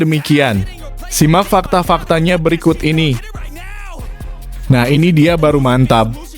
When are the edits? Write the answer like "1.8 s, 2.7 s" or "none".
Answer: 3.3 s, 4.7 s